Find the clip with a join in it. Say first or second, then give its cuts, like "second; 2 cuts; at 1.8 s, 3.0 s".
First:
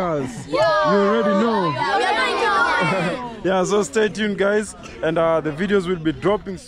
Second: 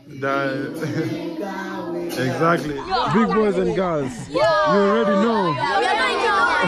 second; 1 cut; at 2.7 s